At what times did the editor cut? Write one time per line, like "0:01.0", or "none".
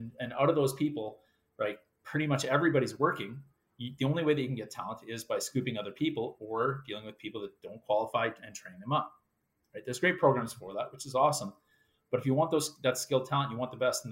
none

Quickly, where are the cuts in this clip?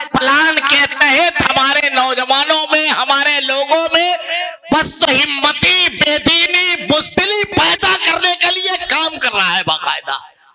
none

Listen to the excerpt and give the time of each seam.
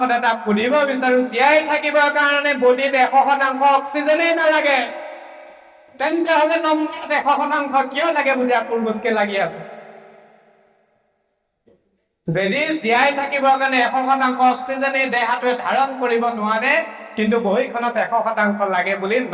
none

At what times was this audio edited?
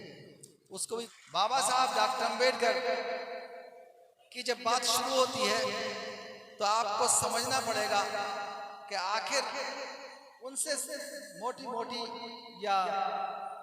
0:01.1

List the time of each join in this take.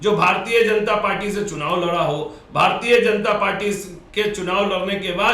none

